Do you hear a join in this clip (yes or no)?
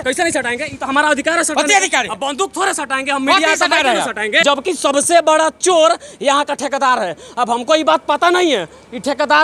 yes